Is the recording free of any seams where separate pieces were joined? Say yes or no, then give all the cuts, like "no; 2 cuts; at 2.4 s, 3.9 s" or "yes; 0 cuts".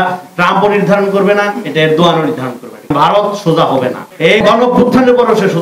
no; 2 cuts; at 2.9 s, 4.4 s